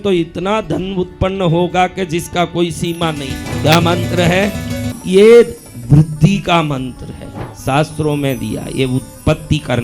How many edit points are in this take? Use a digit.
2